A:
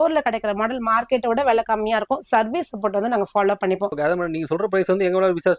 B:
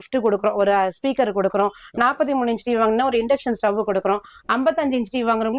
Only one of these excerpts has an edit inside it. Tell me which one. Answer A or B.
A